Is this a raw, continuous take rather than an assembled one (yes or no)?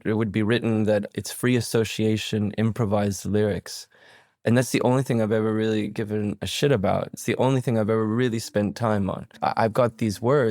no